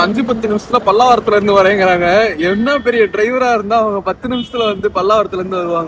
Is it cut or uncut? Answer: uncut